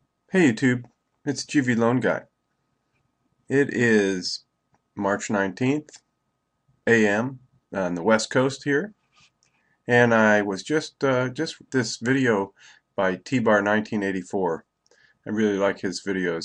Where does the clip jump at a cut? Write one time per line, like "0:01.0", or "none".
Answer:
0:09.9